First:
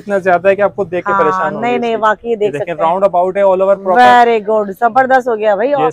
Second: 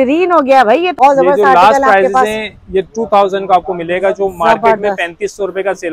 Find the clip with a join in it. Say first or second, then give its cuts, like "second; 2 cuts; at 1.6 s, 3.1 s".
second; 1 cut; at 1.0 s